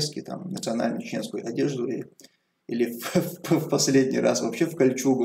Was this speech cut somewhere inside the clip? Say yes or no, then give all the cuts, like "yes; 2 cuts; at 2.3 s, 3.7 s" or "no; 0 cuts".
no; 0 cuts